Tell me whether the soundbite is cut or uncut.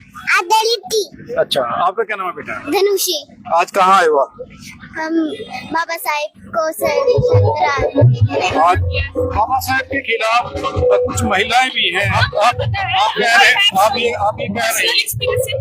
cut